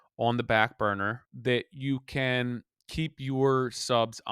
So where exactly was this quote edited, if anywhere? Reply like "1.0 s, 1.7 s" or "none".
1.3 s